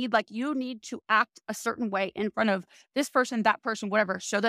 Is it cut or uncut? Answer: uncut